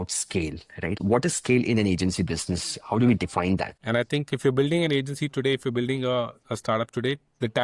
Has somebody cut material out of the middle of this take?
yes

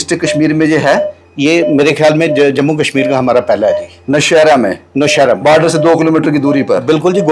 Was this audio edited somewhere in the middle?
no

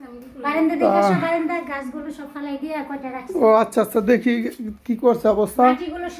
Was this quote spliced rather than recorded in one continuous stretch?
no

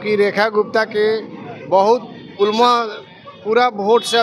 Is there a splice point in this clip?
no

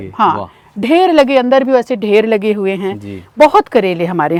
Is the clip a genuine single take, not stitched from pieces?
yes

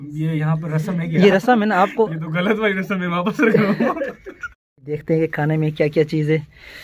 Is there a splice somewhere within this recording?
yes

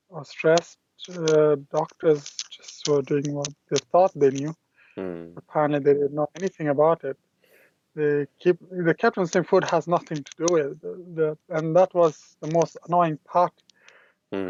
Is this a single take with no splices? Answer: yes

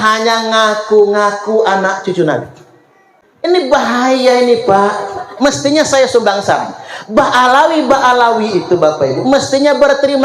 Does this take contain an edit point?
yes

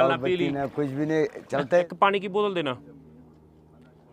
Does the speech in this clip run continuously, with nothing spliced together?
no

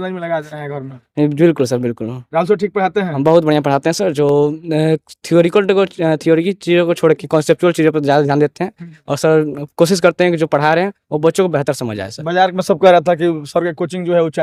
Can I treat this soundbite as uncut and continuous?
yes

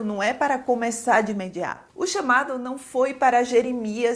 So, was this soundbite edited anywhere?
yes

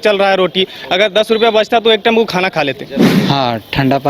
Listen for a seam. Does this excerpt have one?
yes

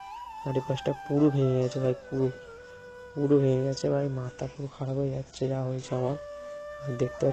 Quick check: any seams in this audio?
no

